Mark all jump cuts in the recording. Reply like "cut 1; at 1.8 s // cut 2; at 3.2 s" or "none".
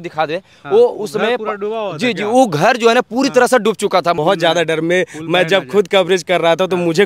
cut 1; at 4.2 s